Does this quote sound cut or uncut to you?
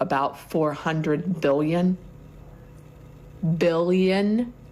uncut